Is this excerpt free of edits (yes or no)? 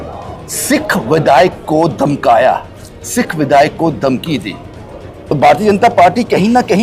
no